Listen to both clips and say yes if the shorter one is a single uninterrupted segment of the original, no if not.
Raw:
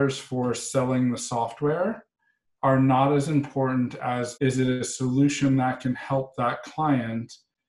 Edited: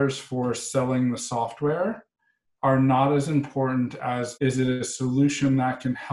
yes